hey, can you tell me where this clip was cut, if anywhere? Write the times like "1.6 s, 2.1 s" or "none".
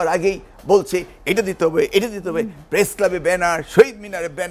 none